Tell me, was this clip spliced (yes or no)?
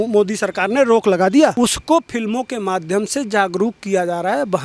yes